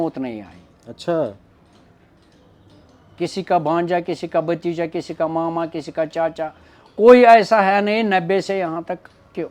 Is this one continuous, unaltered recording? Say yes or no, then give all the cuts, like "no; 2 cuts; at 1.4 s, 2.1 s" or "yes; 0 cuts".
yes; 0 cuts